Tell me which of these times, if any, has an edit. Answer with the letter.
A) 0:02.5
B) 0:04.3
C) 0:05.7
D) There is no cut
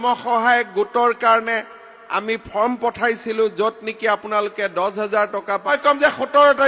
C